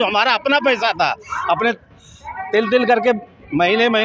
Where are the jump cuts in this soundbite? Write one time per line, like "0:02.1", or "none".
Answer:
none